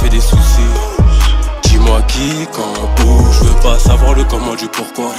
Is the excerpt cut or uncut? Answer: uncut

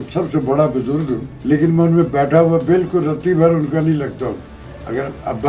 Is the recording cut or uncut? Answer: cut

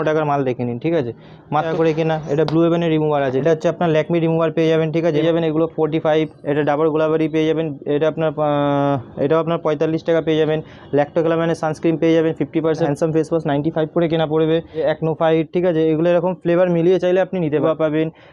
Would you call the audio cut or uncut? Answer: cut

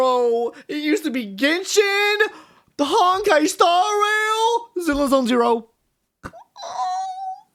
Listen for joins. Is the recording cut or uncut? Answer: uncut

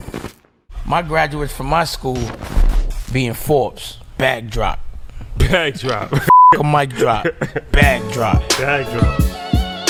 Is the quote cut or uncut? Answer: uncut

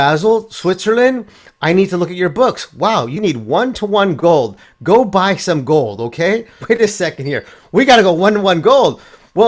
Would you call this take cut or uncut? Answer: cut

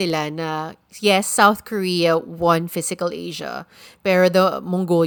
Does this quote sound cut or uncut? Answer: uncut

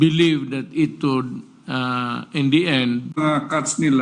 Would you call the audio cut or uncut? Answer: cut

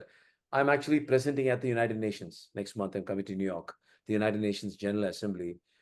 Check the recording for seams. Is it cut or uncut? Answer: uncut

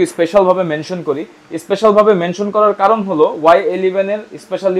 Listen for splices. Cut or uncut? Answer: uncut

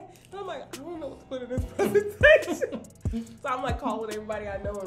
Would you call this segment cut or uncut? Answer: uncut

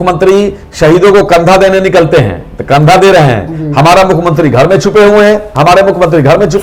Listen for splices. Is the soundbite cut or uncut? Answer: uncut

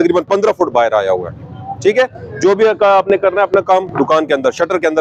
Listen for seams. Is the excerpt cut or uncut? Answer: uncut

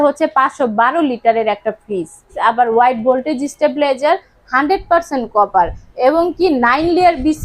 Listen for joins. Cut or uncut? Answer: uncut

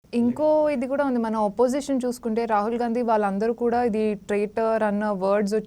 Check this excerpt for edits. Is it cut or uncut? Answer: uncut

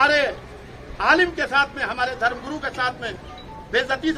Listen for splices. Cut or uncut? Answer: uncut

